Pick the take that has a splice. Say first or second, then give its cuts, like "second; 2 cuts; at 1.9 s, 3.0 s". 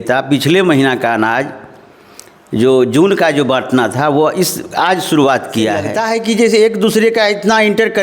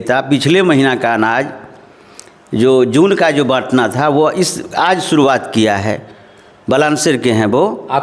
first; 1 cut; at 5.9 s